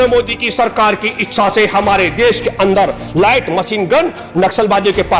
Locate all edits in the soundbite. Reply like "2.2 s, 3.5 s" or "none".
none

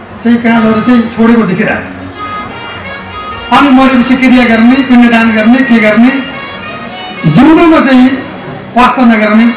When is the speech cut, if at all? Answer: none

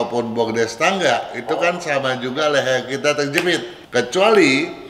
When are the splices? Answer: 3.8 s

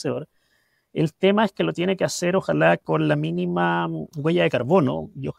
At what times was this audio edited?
none

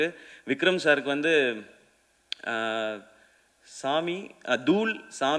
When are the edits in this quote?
none

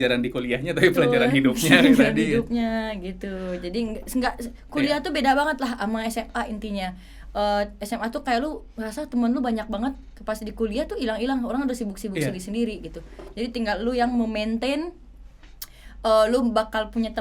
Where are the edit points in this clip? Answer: none

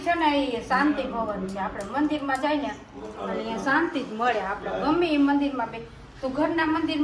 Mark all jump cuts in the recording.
none

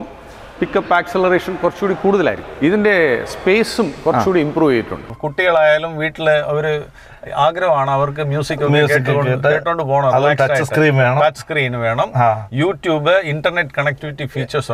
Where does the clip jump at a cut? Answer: 2.4 s, 5.2 s

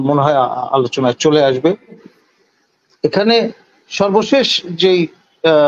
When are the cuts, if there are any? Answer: 2.0 s

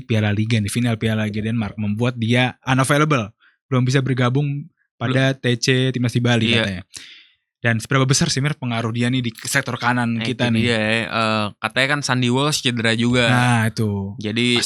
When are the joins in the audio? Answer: none

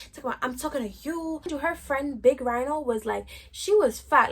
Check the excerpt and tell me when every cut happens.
1.5 s

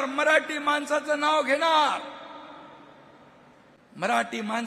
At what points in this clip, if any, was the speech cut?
3.8 s

